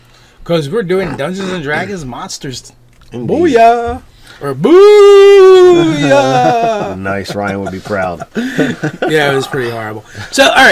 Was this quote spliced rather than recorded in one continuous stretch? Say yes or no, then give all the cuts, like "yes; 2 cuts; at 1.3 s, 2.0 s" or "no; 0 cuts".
yes; 1 cut; at 4.9 s